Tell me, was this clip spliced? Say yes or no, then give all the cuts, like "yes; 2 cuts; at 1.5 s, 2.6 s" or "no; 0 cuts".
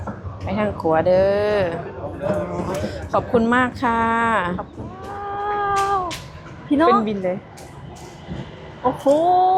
yes; 1 cut; at 5.1 s